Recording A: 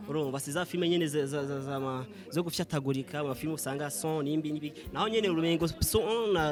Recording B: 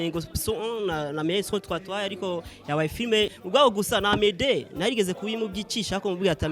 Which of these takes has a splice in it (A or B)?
B